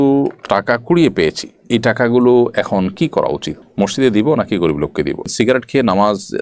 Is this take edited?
yes; 1 cut; at 5.2 s

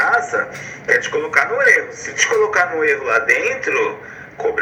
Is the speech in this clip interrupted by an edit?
no; 0 cuts

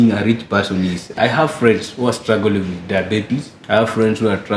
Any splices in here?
yes; 2 cuts; at 1.1 s, 3.5 s

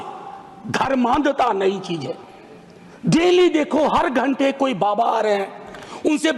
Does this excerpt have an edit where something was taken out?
no; 0 cuts

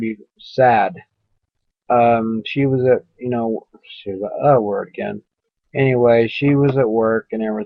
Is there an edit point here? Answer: no; 0 cuts

